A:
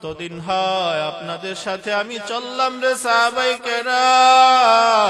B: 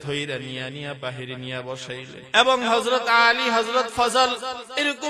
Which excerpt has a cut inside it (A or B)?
B